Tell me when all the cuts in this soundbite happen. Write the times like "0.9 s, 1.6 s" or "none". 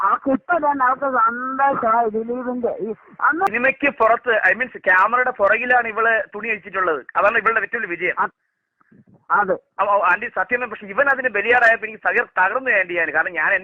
3.5 s